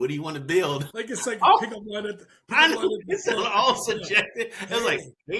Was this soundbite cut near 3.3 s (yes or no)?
no